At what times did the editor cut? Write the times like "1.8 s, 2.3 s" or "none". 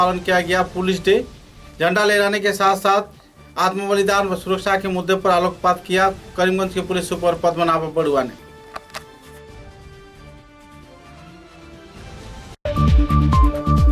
12.5 s